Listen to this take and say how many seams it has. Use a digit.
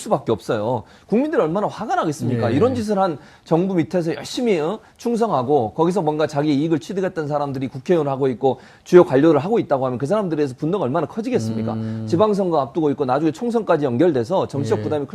1